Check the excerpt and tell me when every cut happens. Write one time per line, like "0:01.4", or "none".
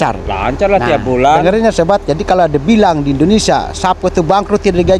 none